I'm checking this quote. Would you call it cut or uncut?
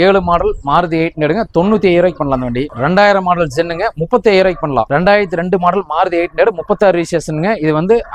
uncut